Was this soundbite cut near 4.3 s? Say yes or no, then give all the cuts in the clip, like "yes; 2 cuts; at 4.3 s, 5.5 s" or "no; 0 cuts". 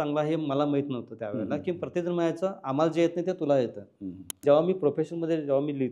yes; 1 cut; at 4.3 s